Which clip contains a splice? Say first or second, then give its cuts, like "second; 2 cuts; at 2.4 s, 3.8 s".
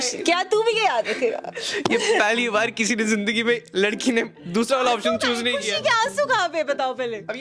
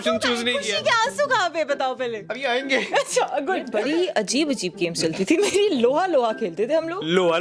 second; 1 cut; at 3.7 s